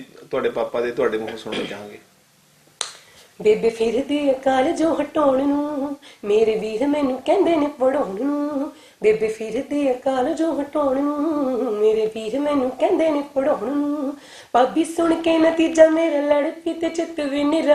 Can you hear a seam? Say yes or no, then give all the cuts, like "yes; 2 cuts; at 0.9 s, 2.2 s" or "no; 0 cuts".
no; 0 cuts